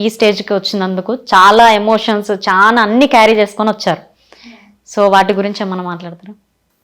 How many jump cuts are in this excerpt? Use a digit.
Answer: 0